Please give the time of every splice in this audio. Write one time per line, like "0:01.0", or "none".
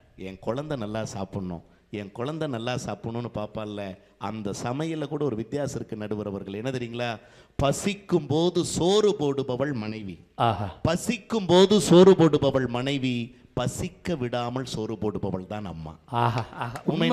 none